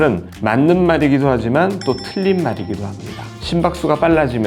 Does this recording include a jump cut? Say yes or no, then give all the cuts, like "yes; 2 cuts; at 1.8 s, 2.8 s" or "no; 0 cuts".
yes; 1 cut; at 3.3 s